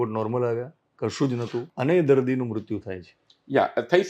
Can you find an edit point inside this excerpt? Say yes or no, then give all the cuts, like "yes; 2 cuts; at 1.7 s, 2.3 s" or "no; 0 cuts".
yes; 1 cut; at 1.7 s